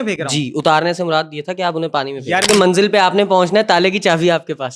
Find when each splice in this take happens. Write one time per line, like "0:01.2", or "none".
0:02.5